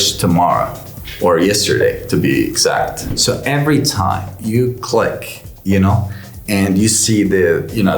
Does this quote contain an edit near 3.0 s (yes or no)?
yes